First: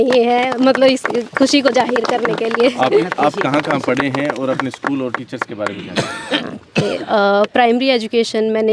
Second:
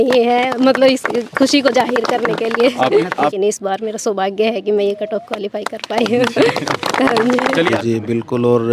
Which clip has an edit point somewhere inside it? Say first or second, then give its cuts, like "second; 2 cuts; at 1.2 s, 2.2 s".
second; 2 cuts; at 3.3 s, 7.7 s